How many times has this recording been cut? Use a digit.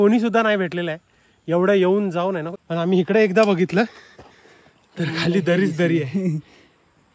1